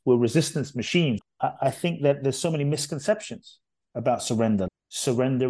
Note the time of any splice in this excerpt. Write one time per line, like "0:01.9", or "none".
0:01.3
0:04.7

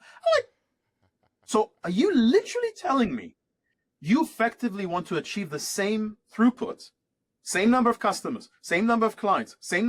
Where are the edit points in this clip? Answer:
none

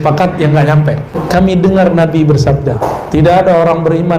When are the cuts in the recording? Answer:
0:01.2
0:02.8

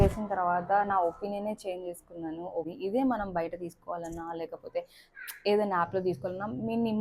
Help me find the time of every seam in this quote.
0:02.7

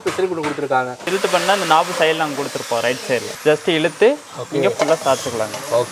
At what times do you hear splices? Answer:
0:01.0
0:03.3

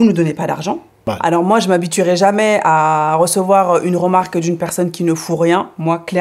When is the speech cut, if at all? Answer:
0:01.1

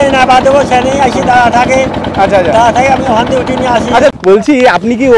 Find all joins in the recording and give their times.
0:04.1

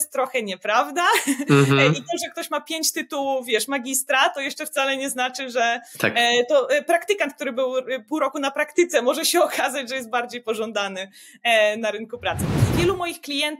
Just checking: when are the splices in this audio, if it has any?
0:12.7

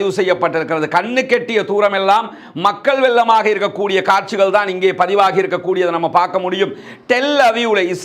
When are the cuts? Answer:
none

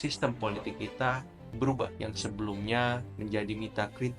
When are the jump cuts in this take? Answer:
0:02.0
0:03.1

